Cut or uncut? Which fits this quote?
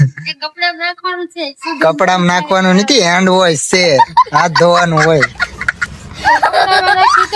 uncut